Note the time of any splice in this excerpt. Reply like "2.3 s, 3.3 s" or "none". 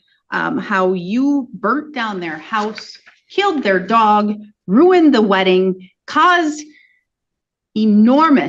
none